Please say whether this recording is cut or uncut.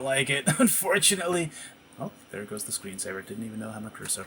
cut